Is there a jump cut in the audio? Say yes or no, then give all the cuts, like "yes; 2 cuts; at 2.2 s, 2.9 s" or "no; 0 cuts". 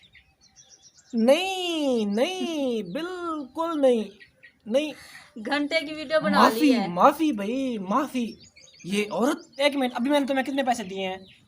yes; 1 cut; at 9.6 s